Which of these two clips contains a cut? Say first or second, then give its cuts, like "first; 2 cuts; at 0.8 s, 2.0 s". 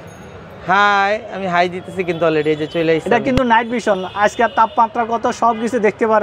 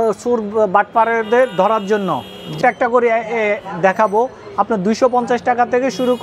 second; 1 cut; at 2.6 s